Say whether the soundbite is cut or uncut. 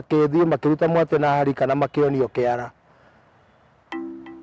uncut